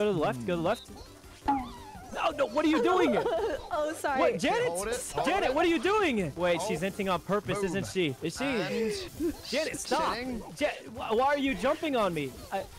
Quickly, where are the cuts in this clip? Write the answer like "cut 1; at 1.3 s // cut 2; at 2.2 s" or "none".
none